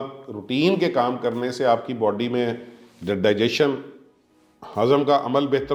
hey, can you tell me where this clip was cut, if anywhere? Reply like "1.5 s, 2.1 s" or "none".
none